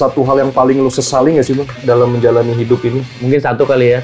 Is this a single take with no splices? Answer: yes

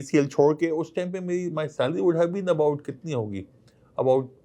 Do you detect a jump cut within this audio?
no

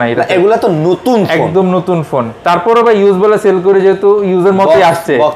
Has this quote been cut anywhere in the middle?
no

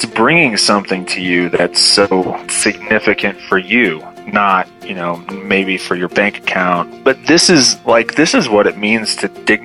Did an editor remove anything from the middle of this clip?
yes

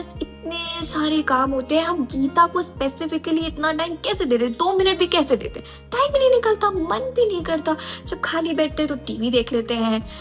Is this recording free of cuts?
yes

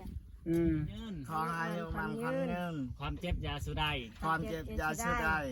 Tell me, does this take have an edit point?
yes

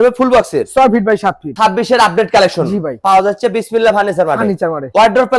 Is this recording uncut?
no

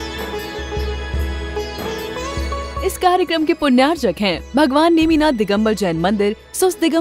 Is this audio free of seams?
no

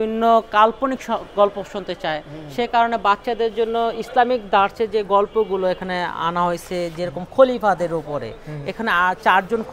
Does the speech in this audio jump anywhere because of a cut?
no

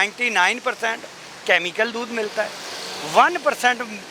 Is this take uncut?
yes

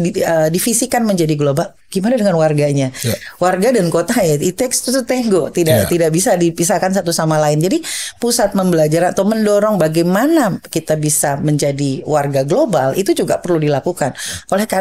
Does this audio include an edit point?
no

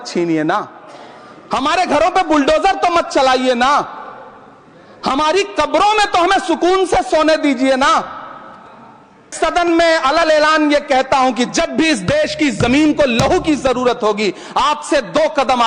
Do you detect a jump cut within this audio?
yes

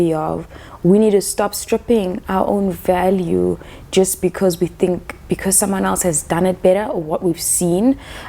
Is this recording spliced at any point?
no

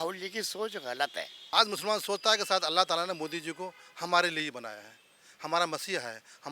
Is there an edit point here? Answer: yes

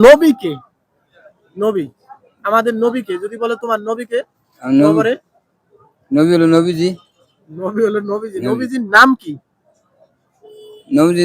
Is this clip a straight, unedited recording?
yes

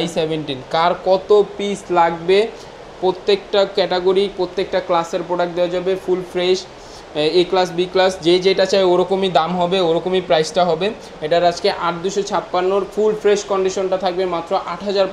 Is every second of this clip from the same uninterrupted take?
yes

